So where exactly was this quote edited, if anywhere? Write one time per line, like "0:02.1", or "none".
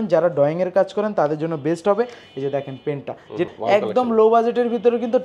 0:03.5